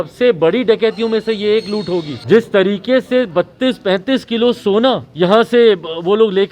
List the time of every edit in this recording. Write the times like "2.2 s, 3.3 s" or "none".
2.1 s, 5.1 s